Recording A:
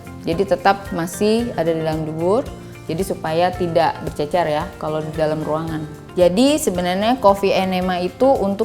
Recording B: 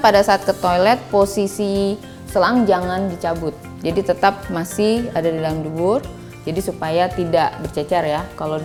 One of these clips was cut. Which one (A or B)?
A